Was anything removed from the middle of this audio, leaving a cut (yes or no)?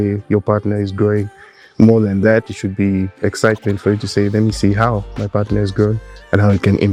no